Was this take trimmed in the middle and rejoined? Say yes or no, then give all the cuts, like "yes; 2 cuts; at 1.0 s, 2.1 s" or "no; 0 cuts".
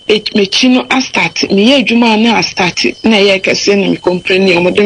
no; 0 cuts